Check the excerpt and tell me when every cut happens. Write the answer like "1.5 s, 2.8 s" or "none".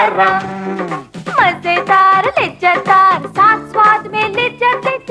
none